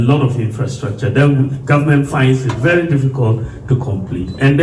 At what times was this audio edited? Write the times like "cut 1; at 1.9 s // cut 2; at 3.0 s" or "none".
none